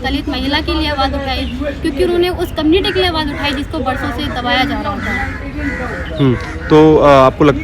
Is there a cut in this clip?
no; 0 cuts

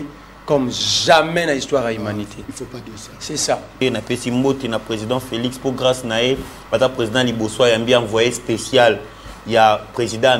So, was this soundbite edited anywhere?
yes; 1 cut; at 3.8 s

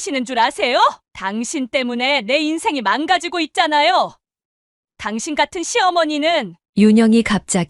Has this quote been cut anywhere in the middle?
yes; 1 cut; at 1.1 s

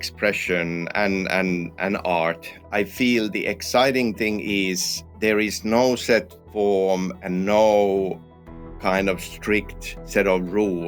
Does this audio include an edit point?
no; 0 cuts

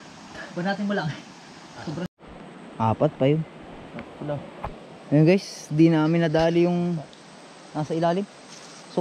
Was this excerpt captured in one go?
no; 1 cut; at 2.1 s

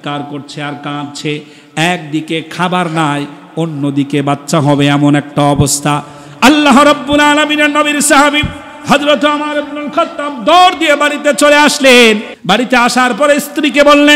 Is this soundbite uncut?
yes; 0 cuts

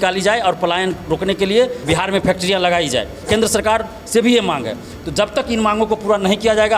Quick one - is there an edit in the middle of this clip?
yes; 2 cuts; at 1.8 s, 3.2 s

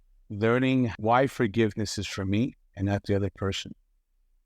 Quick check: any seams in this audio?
yes; 1 cut; at 1.0 s

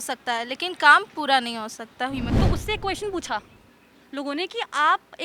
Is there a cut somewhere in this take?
yes; 1 cut; at 2.3 s

